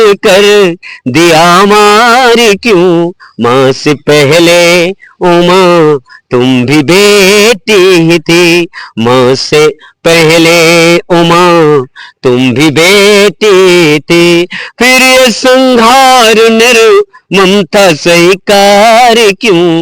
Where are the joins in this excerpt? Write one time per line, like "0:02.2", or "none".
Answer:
none